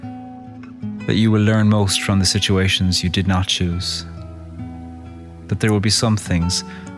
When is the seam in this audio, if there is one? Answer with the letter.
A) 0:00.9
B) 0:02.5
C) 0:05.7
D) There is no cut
A